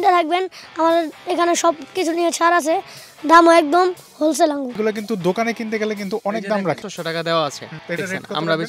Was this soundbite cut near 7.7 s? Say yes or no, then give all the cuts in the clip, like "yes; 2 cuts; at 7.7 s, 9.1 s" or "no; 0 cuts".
yes; 3 cuts; at 4.8 s, 6.8 s, 7.7 s